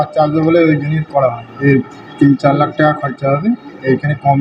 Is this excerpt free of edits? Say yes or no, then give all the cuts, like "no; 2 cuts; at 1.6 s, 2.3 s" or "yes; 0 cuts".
no; 1 cut; at 1.5 s